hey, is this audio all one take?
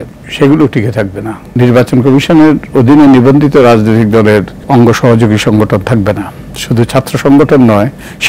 no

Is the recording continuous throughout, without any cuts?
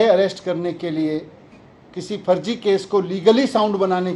yes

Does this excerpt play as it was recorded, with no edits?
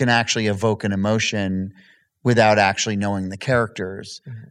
yes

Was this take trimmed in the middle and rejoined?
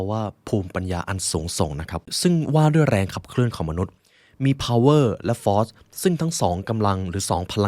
yes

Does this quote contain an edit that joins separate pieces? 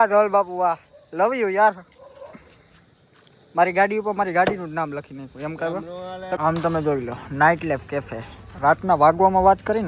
yes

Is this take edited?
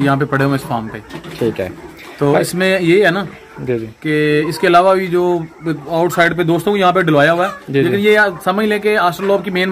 no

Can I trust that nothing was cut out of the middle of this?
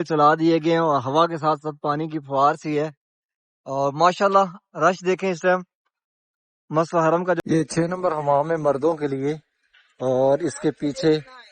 no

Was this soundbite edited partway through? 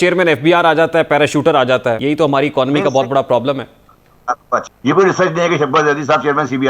yes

